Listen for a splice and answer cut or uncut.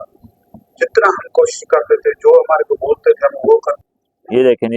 cut